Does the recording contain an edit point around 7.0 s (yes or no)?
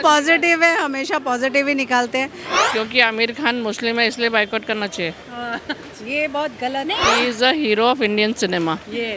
yes